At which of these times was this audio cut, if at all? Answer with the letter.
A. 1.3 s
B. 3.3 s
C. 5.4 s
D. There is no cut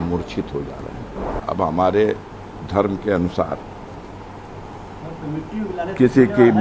A